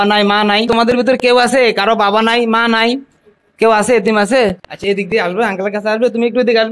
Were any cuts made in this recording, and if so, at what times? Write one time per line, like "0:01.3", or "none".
0:01.2
0:05.1